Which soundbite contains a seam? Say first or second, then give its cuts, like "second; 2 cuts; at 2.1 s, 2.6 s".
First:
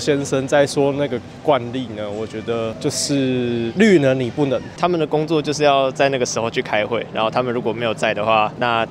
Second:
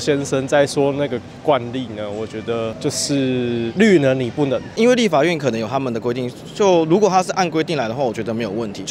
first; 1 cut; at 4.7 s